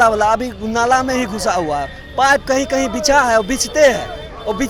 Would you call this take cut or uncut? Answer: uncut